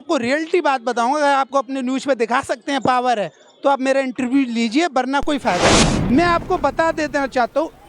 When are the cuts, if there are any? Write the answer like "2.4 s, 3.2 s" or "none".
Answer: 5.9 s

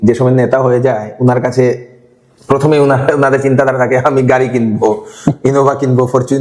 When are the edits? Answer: none

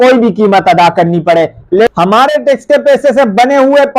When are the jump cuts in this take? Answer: 1.9 s

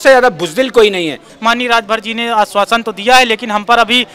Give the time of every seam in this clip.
1.3 s

